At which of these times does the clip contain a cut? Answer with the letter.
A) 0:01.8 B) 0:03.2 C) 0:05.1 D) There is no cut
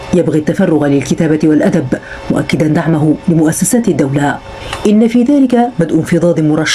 D